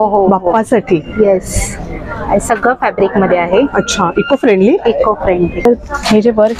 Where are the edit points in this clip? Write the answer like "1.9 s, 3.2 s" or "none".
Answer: 5.6 s